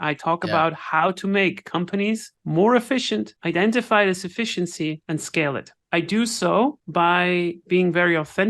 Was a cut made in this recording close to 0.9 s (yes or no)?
no